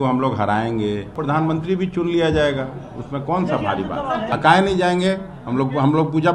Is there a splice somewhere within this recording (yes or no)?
yes